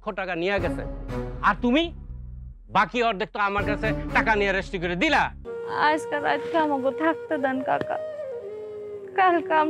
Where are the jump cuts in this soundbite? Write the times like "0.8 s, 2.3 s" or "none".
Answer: 5.5 s